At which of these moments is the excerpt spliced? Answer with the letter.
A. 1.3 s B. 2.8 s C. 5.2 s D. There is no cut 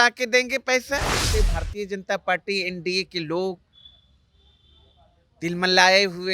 A